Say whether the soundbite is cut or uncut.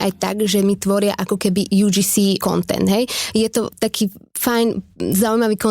cut